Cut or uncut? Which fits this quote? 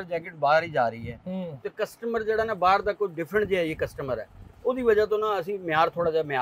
uncut